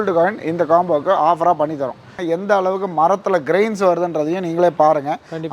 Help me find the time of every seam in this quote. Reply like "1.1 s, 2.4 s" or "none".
2.1 s